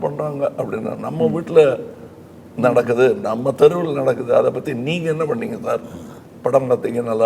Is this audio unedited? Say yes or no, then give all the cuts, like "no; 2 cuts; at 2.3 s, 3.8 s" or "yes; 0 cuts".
yes; 0 cuts